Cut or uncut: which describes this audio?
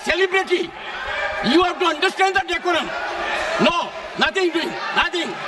uncut